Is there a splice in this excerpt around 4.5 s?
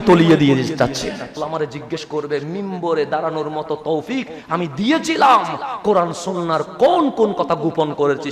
no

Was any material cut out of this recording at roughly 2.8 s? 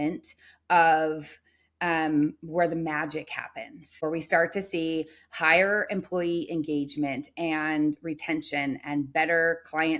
no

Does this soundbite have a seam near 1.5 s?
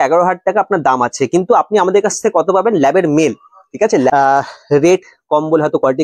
no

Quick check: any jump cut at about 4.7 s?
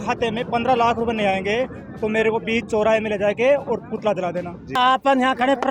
yes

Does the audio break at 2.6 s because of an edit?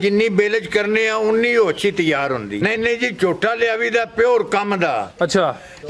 yes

